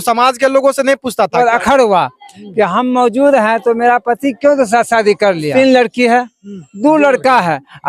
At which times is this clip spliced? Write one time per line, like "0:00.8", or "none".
0:01.3
0:05.5